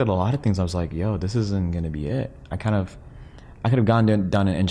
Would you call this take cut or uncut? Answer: uncut